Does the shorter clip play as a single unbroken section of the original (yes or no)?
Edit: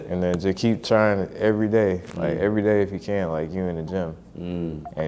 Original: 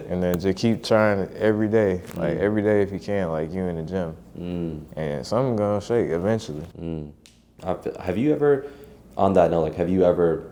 yes